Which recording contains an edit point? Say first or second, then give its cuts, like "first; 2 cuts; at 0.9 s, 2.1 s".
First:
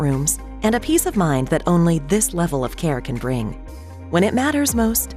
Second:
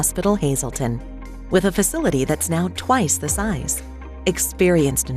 second; 1 cut; at 1.0 s